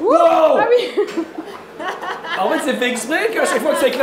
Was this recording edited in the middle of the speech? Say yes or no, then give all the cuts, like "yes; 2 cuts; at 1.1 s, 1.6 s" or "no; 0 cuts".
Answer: no; 0 cuts